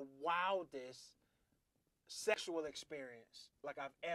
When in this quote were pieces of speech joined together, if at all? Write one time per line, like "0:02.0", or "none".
none